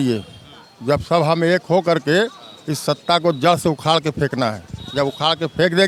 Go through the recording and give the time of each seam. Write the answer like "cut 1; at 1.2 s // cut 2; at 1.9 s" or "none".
none